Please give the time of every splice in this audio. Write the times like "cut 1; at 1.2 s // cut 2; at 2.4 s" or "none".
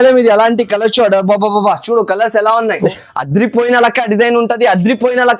cut 1; at 2.9 s